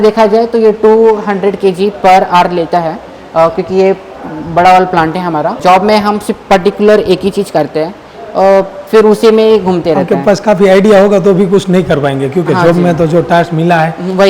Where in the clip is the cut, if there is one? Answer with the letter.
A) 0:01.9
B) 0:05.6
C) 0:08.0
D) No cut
B